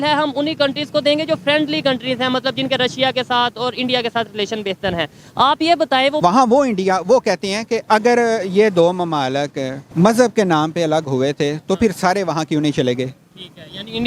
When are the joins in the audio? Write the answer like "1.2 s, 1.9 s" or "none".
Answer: 6.2 s, 7.8 s, 9.8 s